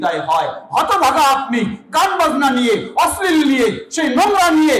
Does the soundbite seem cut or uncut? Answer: uncut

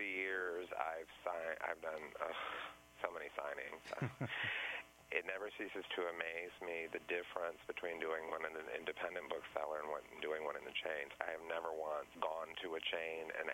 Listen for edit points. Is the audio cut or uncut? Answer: cut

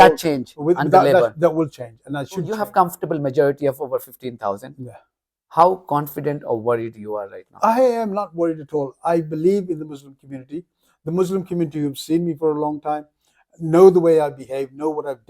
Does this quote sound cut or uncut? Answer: cut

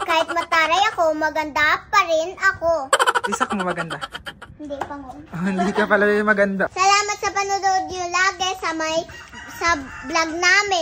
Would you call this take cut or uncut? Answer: cut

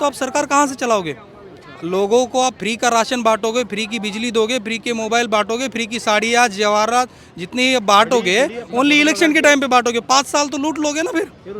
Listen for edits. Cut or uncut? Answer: uncut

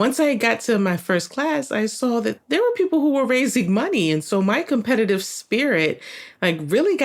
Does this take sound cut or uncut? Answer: uncut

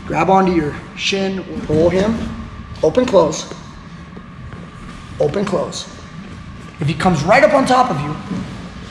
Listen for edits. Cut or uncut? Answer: cut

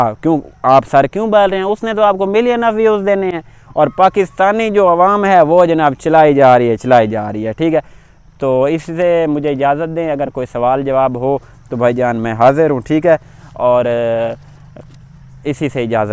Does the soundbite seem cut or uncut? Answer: uncut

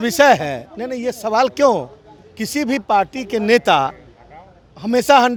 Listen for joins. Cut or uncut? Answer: uncut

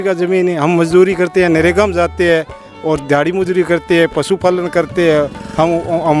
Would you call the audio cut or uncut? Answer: uncut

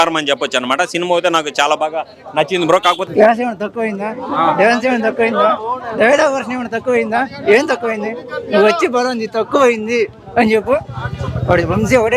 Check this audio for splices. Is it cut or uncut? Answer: cut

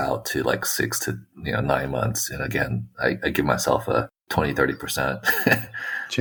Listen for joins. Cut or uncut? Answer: uncut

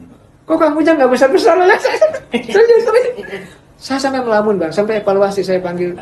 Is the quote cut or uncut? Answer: uncut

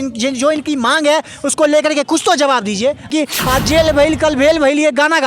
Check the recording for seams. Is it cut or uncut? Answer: cut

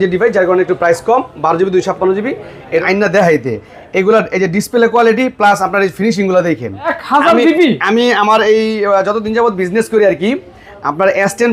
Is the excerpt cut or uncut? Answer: cut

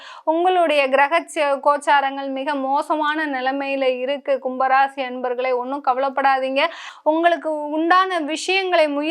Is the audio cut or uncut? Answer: cut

